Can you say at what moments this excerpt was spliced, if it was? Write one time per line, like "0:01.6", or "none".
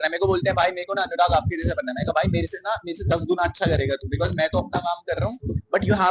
none